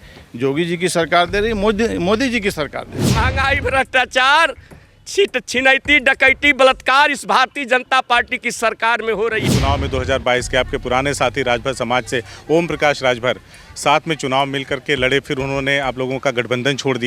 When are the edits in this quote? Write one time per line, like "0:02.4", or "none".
0:03.0
0:09.5